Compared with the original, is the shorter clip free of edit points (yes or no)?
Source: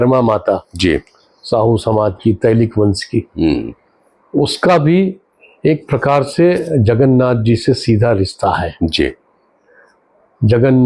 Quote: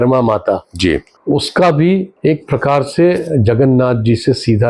no